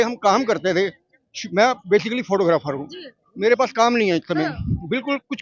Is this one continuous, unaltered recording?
yes; 0 cuts

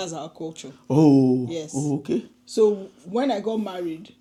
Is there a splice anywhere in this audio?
no; 0 cuts

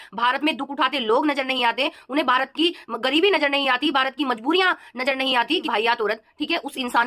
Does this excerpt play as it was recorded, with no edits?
no; 1 cut; at 5.7 s

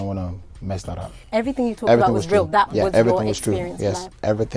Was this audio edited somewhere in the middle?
yes; 1 cut; at 1.2 s

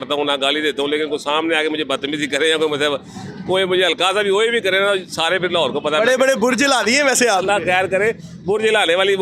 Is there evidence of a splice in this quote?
no; 0 cuts

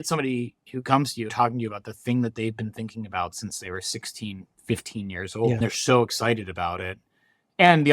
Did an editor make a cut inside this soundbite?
yes; 2 cuts; at 1.3 s, 5.6 s

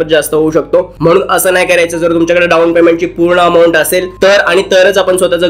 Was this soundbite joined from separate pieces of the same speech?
no; 0 cuts

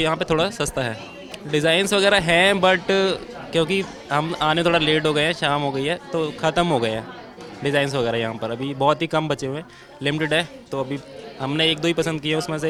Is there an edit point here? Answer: no; 0 cuts

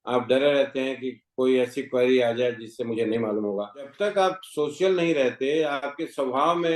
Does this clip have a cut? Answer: yes; 1 cut; at 3.9 s

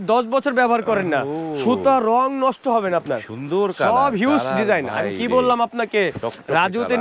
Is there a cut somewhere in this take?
no; 0 cuts

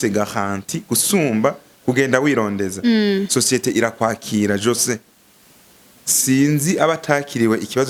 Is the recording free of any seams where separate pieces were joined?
yes; 0 cuts

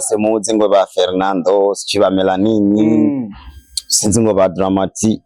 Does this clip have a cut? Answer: no; 0 cuts

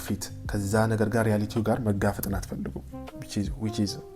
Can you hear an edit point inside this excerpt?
no; 0 cuts

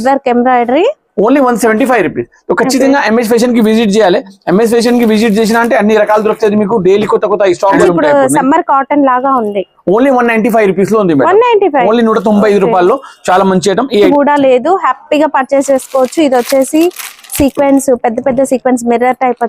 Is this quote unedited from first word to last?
no; 2 cuts; at 7.8 s, 14.1 s

